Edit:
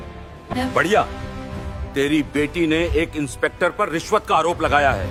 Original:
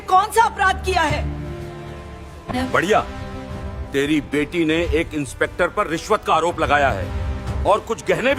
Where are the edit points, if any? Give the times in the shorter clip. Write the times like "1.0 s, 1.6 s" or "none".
none